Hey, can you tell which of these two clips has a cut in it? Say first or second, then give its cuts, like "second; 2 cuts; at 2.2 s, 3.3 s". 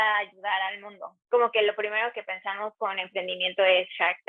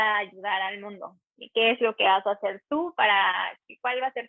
first; 1 cut; at 1.1 s